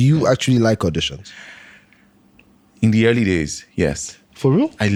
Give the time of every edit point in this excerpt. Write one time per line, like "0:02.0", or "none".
none